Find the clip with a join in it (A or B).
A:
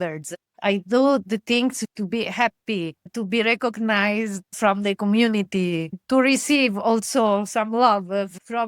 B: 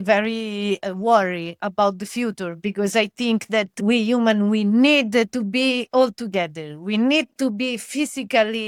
A